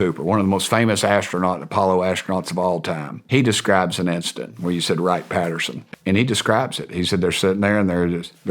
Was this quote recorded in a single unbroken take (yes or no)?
no